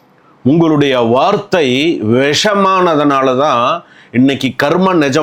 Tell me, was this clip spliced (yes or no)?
no